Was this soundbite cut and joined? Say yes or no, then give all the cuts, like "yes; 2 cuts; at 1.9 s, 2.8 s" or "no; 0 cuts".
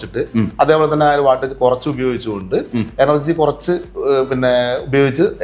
no; 0 cuts